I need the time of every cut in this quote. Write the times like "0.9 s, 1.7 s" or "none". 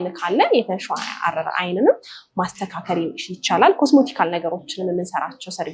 none